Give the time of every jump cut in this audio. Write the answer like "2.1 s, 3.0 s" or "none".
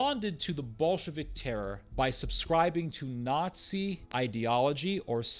1.8 s, 4.0 s

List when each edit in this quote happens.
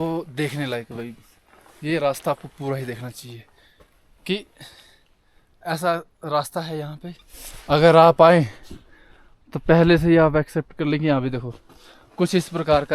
none

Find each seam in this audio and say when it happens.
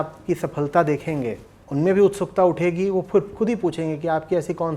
1.6 s

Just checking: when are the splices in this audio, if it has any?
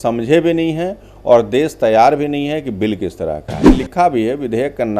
3.7 s

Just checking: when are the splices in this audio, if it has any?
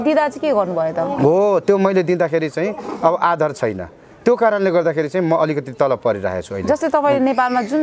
none

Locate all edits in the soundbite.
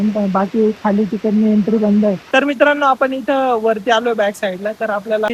none

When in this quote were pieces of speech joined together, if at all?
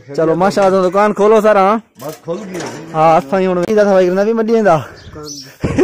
3.7 s

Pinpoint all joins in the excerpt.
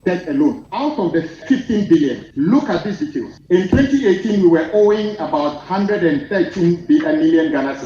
1.1 s, 2.2 s, 3.3 s

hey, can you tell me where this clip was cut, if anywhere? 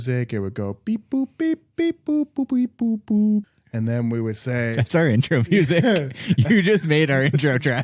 3.6 s

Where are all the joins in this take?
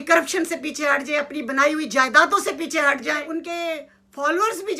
3.2 s

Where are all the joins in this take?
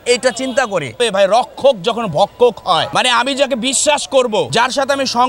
1.0 s, 2.9 s, 4.5 s

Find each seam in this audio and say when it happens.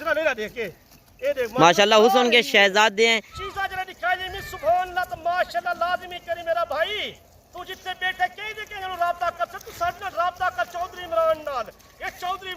3.3 s

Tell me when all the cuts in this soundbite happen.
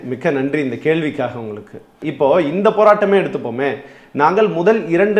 2.0 s

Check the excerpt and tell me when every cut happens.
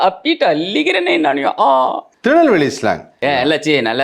2.1 s, 3.2 s

